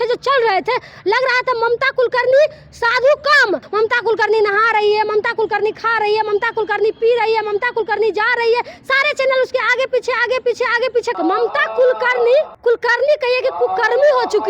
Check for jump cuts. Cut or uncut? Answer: cut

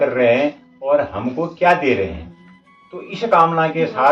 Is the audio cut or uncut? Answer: uncut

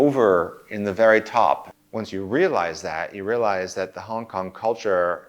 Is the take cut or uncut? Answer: cut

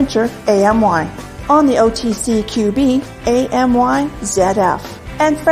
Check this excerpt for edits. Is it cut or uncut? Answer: uncut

